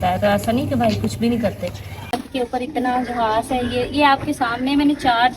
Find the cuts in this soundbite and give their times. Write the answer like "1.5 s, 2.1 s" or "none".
2.2 s